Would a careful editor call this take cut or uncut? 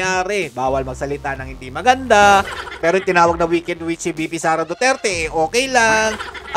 uncut